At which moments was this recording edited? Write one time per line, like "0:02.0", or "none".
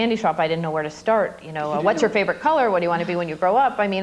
none